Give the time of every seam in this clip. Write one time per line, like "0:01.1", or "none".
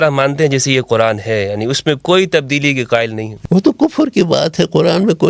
0:03.3